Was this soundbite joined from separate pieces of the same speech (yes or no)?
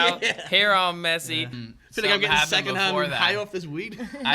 yes